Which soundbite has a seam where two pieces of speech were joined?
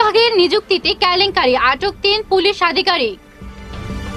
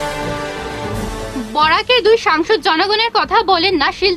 second; 1 cut; at 0.9 s

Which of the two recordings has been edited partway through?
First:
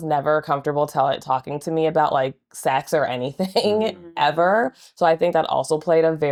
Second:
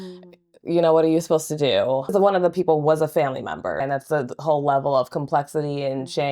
second; 2 cuts; at 2.1 s, 3.8 s

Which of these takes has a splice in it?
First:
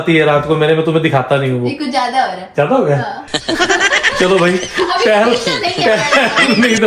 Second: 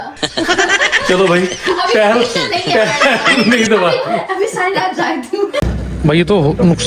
second; 1 cut; at 5.7 s

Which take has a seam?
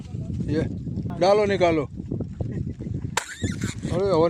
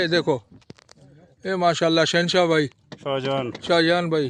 first; 1 cut; at 1.1 s

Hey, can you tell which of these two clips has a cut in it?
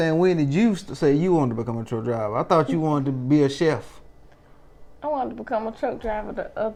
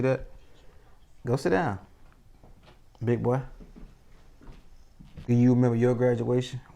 second; 1 cut; at 5.2 s

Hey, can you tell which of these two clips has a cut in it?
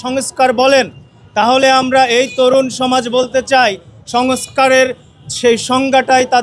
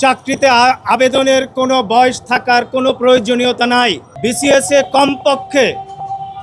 second; 1 cut; at 4.1 s

